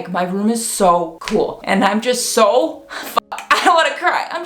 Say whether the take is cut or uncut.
uncut